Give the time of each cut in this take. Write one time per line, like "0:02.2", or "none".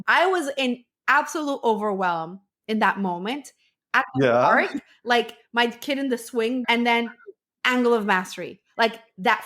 0:06.6